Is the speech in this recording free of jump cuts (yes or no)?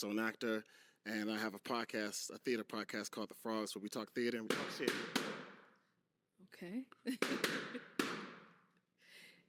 yes